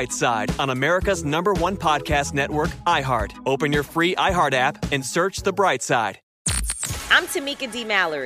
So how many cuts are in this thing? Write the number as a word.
one